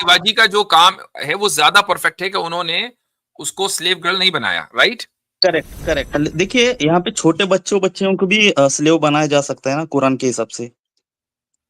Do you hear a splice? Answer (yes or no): yes